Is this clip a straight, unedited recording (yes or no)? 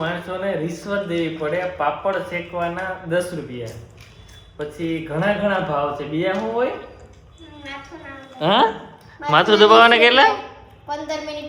yes